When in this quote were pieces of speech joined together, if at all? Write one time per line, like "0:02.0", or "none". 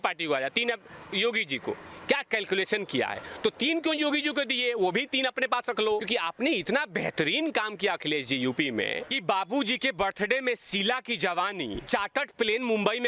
0:06.1
0:09.1
0:11.8